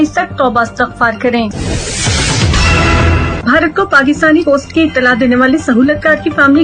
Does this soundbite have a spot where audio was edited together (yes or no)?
yes